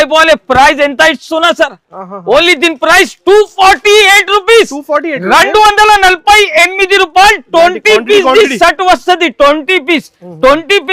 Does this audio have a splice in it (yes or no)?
no